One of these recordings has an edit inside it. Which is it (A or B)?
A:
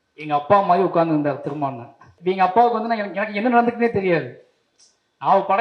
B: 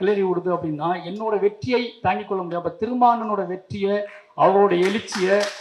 A